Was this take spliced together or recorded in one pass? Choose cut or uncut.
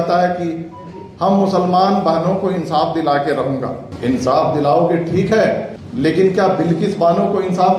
cut